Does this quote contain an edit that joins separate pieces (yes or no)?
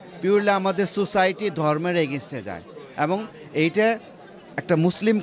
no